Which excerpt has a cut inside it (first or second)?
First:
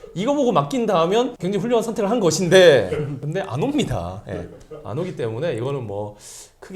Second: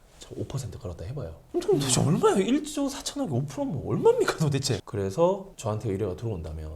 second